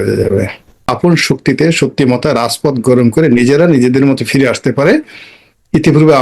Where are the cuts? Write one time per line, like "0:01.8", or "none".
0:00.9